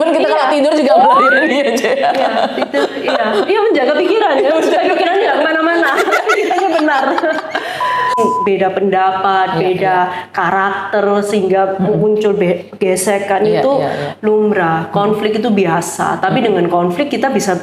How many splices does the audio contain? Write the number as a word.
one